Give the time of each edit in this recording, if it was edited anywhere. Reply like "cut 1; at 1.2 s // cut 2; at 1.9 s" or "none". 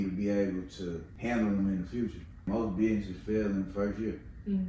cut 1; at 1.1 s // cut 2; at 2.5 s

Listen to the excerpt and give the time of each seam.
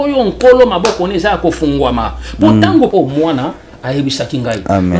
cut 1; at 2.9 s

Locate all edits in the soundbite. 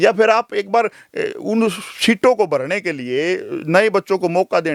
none

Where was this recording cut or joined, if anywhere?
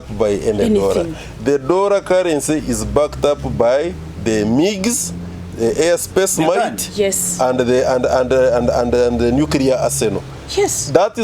none

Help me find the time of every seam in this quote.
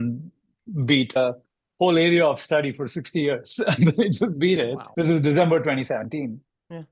cut 1; at 1.2 s // cut 2; at 4.8 s

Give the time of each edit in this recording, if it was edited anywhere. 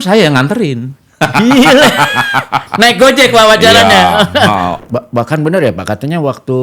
cut 1; at 4.8 s

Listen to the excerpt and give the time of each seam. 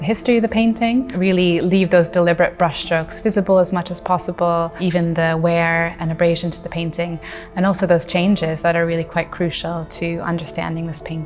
none

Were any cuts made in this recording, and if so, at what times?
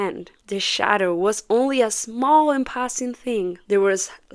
none

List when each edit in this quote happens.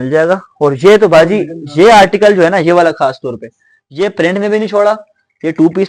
none

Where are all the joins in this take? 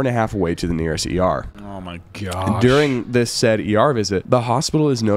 cut 1; at 4.2 s

